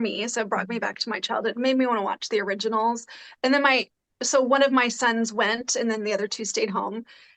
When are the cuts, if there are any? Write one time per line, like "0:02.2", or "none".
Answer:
none